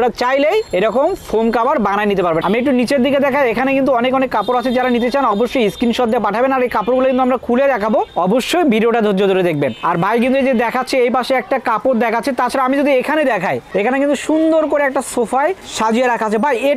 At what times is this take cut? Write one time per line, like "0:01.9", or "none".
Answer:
none